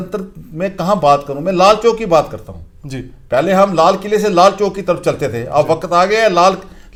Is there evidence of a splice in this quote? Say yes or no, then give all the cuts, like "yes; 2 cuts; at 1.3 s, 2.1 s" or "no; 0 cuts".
no; 0 cuts